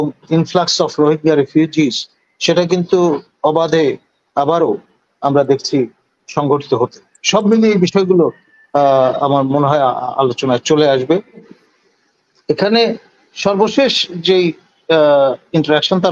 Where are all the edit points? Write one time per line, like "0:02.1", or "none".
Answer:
0:11.5